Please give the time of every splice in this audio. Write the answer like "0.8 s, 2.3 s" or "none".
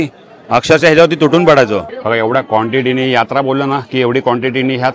1.8 s

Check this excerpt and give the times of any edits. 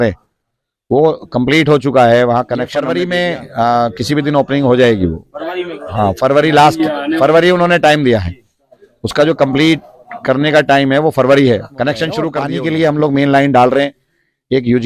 2.8 s, 12.4 s

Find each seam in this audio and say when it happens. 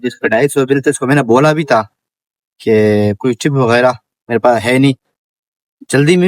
4.1 s

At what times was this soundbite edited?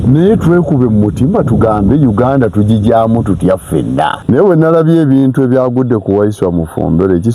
4.2 s

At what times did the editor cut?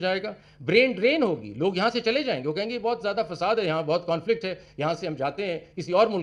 none

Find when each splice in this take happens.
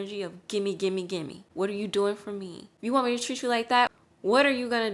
1.4 s, 2.6 s, 3.9 s

